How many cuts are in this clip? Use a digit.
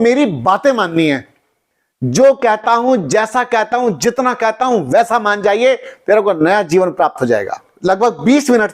1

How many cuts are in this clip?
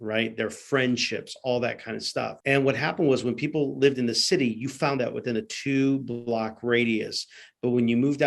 1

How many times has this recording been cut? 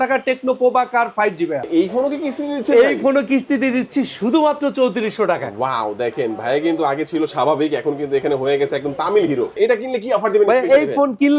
2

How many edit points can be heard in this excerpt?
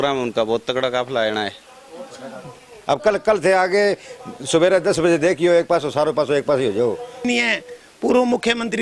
2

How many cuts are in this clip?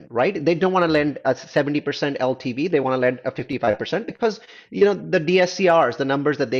0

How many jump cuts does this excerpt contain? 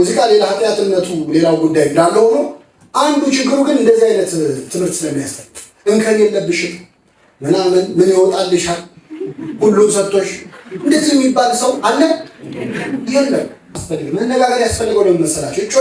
1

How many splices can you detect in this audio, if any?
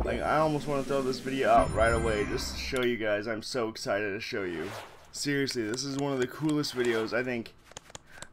1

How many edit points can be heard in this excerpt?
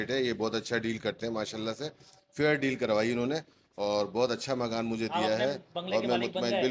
0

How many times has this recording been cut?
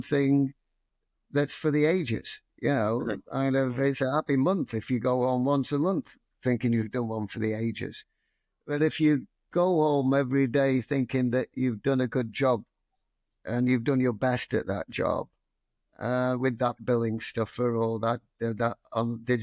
0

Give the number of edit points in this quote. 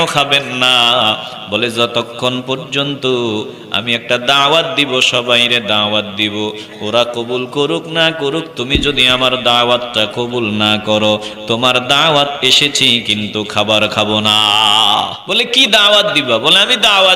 1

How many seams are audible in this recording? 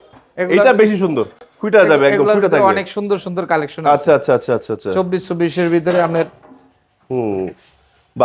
0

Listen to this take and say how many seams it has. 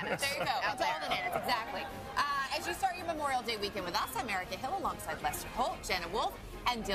0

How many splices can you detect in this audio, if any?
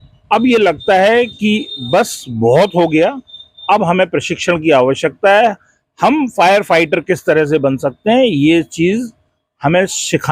0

